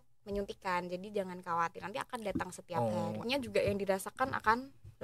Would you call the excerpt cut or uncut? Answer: cut